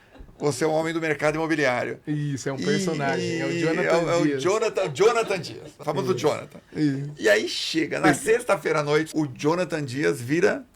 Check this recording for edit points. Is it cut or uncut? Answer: cut